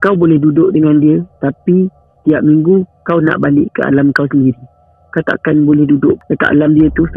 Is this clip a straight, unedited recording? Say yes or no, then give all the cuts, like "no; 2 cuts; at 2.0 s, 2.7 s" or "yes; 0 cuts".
no; 1 cut; at 6.2 s